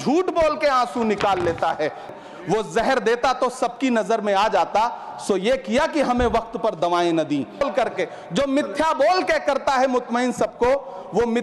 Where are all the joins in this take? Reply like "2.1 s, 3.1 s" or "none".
2.1 s, 7.6 s